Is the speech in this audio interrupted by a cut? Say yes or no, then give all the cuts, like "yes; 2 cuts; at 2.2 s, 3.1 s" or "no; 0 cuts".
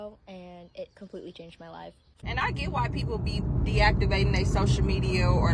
yes; 1 cut; at 2.2 s